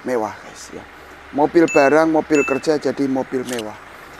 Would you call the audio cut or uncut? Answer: uncut